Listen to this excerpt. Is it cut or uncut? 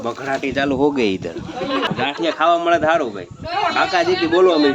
cut